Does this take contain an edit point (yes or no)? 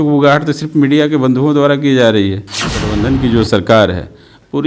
yes